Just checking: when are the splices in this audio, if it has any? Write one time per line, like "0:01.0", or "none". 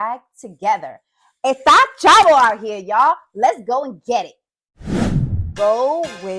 0:05.4